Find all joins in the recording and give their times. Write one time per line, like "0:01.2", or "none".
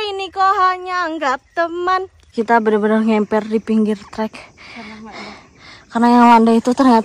0:02.2